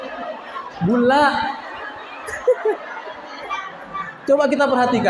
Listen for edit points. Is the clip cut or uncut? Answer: uncut